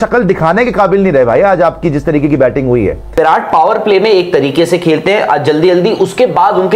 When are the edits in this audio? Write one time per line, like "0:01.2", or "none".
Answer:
0:03.1